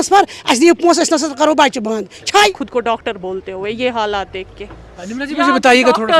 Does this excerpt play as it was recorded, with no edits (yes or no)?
no